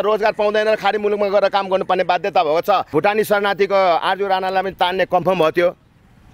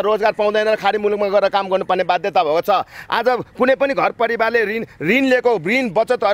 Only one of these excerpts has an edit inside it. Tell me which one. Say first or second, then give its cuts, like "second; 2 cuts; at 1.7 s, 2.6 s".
first; 1 cut; at 2.9 s